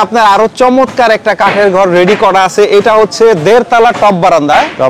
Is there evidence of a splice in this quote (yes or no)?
no